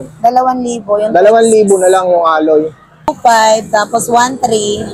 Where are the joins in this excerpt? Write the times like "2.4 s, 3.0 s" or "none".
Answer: 3.1 s